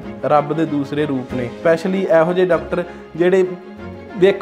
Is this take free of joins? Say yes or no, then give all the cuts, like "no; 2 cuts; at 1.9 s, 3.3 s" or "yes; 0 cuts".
yes; 0 cuts